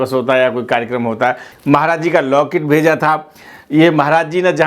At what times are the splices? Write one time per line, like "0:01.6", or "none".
0:01.5

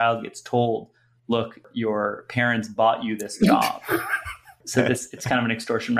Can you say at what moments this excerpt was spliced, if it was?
0:01.6
0:04.6

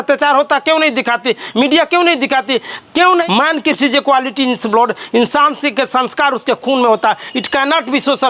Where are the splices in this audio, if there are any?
0:03.2

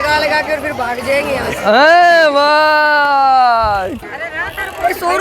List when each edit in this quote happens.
0:04.0

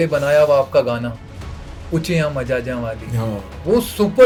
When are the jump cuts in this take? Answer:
none

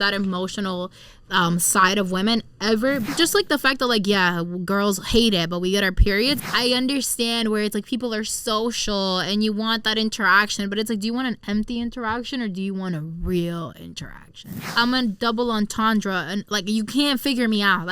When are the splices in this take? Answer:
0:03.1
0:06.4
0:14.6

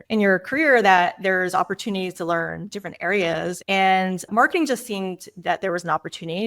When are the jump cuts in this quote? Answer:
0:03.6

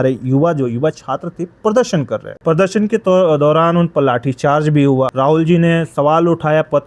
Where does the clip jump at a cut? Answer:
0:02.3
0:05.1

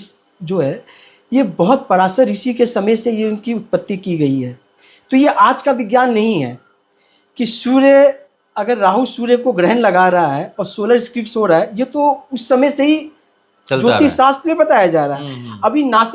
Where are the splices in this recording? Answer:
none

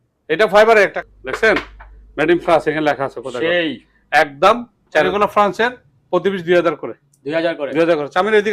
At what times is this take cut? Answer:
0:01.0
0:05.1

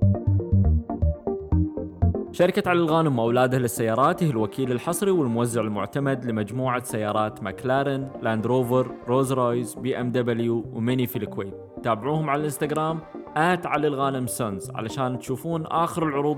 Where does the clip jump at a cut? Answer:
0:02.3

